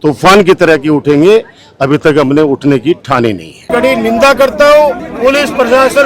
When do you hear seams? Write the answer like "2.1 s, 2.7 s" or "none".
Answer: 3.5 s, 5.1 s